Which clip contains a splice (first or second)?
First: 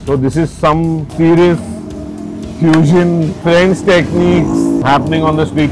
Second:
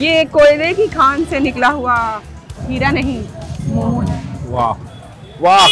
first